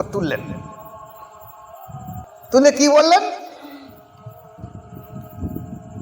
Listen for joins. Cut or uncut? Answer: cut